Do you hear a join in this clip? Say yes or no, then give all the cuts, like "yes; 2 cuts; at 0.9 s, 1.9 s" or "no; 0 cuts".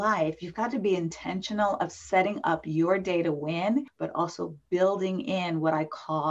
no; 0 cuts